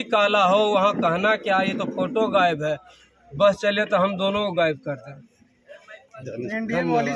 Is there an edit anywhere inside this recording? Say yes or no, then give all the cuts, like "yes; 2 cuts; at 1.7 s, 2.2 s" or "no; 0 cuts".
no; 0 cuts